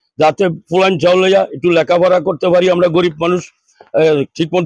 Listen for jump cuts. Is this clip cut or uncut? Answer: uncut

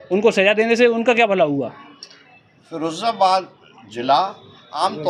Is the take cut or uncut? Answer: uncut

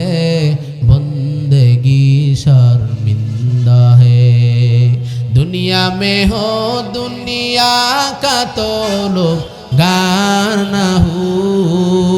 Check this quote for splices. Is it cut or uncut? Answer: uncut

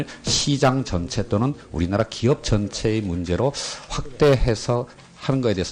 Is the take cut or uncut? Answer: cut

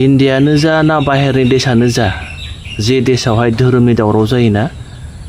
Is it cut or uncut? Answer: uncut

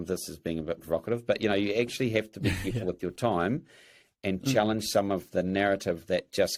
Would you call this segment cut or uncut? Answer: uncut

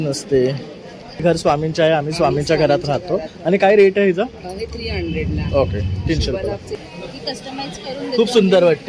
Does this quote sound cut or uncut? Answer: cut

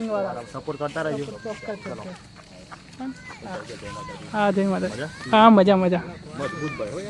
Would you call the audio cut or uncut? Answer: uncut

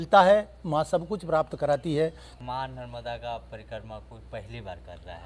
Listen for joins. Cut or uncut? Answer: cut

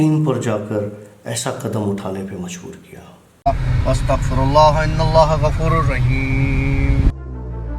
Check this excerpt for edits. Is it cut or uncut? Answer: cut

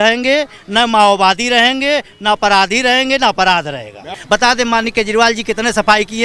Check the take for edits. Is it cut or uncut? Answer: cut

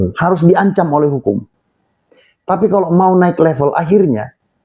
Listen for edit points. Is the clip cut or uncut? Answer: uncut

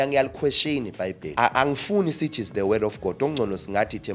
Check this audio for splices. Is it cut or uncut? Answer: cut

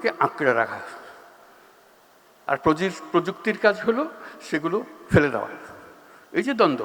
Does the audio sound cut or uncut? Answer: uncut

